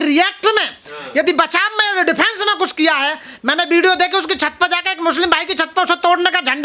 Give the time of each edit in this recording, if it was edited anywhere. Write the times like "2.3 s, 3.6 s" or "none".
none